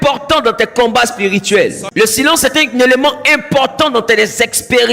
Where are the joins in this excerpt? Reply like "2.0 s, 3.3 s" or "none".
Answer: 1.8 s